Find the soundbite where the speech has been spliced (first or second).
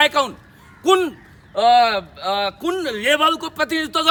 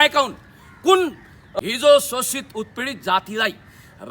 second